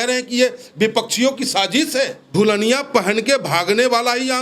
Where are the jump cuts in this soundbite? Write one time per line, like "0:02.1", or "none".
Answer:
0:02.2